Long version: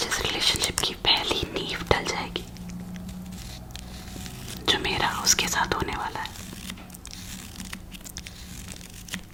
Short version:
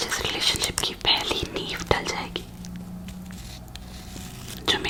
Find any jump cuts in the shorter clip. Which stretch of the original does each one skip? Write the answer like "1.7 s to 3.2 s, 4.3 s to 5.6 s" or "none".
none